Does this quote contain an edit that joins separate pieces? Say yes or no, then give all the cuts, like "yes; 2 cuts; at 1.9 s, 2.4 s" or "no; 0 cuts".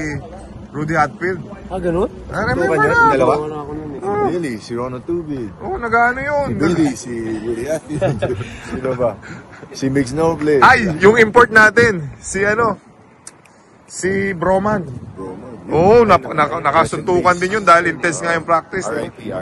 no; 0 cuts